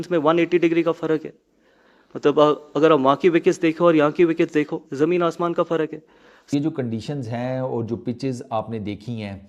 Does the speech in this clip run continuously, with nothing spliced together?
no; 1 cut; at 6.5 s

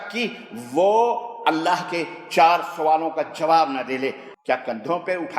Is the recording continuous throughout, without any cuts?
no; 1 cut; at 4.2 s

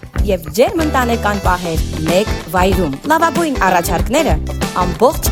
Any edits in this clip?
no; 0 cuts

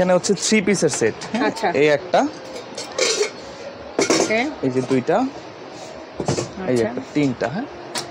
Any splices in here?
no; 0 cuts

